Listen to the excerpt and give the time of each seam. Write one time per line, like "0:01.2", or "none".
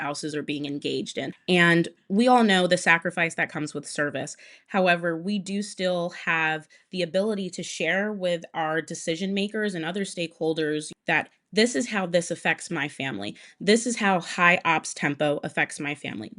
0:01.3
0:10.9